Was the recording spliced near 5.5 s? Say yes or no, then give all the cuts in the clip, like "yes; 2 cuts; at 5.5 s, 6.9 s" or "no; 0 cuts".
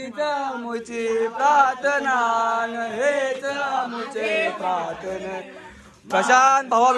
no; 0 cuts